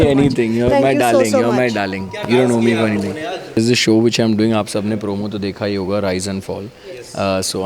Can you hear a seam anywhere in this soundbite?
yes; 1 cut; at 3.6 s

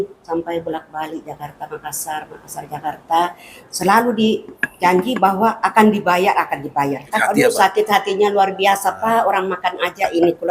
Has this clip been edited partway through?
yes; 2 cuts; at 3.7 s, 7.4 s

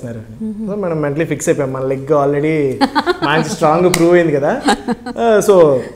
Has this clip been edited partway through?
no; 0 cuts

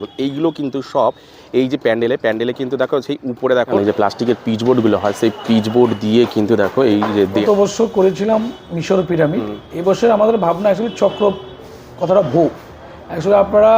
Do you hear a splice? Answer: yes; 2 cuts; at 3.8 s, 7.4 s

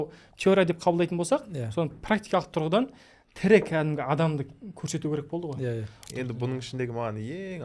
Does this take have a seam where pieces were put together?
yes; 1 cut; at 6.1 s

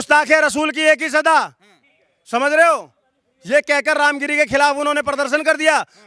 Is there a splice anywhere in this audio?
no; 0 cuts

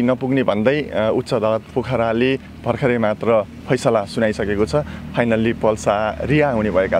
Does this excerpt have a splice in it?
no; 0 cuts

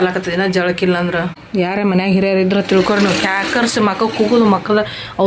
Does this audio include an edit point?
yes; 1 cut; at 1.4 s

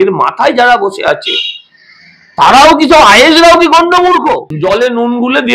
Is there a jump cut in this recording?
yes; 1 cut; at 4.5 s

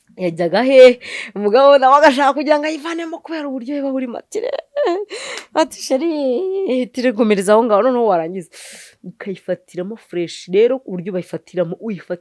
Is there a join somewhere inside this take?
no; 0 cuts

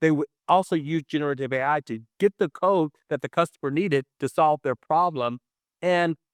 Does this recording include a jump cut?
no; 0 cuts

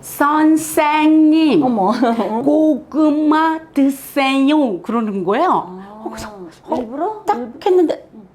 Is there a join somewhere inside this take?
yes; 1 cut; at 2.4 s

